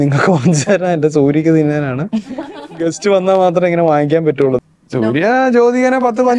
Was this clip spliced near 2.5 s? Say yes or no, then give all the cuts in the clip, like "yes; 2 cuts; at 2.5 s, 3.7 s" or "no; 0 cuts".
no; 1 cut; at 4.6 s